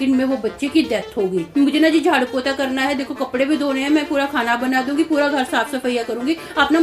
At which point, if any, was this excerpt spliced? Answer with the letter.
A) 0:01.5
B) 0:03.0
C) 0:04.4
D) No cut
A